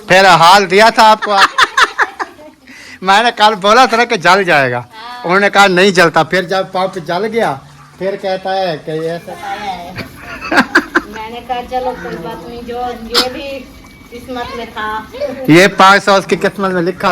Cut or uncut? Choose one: cut